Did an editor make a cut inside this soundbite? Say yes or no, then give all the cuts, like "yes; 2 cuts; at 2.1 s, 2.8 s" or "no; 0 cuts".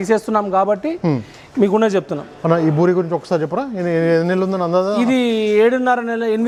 no; 0 cuts